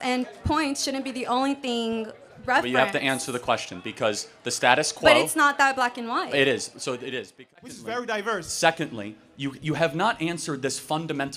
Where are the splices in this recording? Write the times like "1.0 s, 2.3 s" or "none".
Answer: 7.6 s

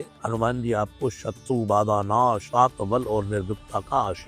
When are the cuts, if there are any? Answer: none

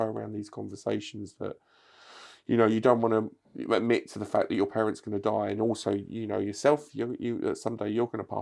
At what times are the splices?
none

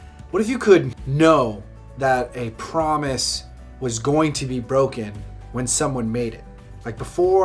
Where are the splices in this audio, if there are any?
none

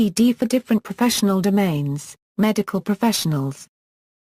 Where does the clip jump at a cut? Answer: 2.1 s

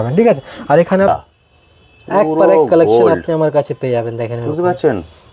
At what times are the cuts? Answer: 1.1 s

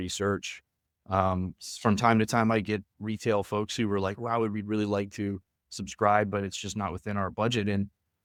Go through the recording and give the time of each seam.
none

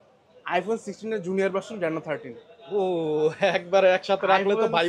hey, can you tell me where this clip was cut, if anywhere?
none

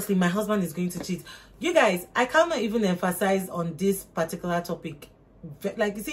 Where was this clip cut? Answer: none

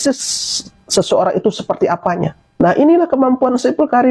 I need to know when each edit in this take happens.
2.4 s

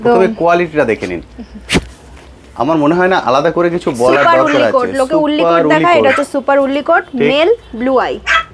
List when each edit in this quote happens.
none

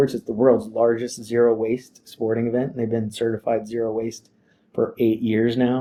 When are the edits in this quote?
none

